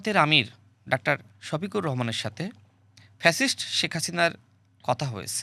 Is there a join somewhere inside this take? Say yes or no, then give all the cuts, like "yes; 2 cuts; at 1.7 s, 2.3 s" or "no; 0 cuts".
no; 0 cuts